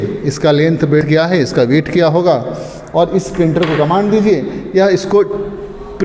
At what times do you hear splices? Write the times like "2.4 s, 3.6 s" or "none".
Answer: 1.1 s